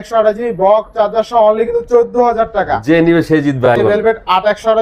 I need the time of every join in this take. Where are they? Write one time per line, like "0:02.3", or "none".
0:03.7